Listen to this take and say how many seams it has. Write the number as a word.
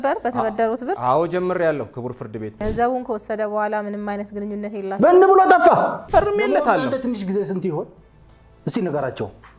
two